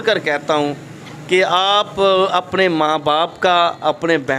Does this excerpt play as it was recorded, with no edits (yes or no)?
yes